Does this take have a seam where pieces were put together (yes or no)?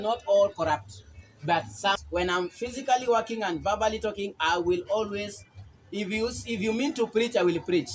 yes